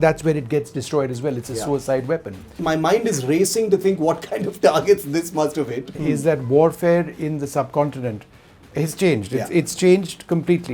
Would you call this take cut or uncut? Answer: cut